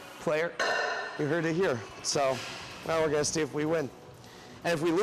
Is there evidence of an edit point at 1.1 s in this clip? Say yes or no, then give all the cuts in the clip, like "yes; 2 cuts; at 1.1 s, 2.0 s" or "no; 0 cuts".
no; 0 cuts